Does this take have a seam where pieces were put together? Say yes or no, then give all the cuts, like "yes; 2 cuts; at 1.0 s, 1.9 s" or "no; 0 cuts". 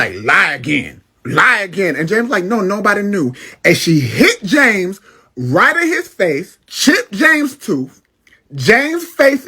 no; 0 cuts